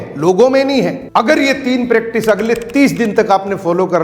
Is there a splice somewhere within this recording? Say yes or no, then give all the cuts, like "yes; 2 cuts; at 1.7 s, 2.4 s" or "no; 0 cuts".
yes; 1 cut; at 1.0 s